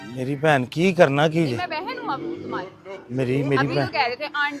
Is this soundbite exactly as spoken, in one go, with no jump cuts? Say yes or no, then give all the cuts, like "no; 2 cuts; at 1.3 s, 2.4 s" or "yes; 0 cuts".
yes; 0 cuts